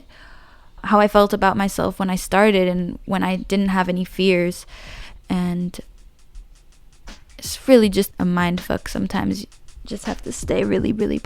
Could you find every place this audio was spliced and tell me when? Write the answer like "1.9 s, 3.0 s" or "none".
8.1 s